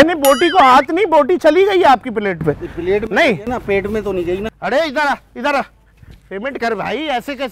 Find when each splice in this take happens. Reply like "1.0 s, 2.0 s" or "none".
4.5 s